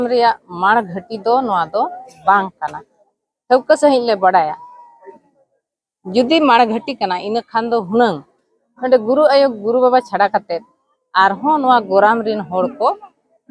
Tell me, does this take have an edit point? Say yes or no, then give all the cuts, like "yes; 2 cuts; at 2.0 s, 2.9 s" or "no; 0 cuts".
no; 0 cuts